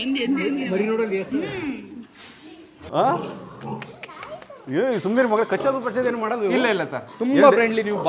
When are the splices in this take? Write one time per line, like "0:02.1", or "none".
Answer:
0:02.8